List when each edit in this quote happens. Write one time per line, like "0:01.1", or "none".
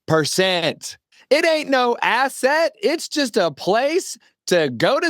0:01.1